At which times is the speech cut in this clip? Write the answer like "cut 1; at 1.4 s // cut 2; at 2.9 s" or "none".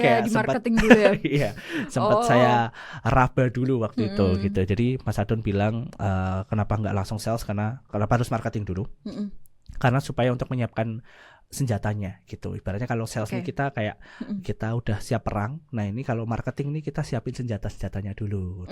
none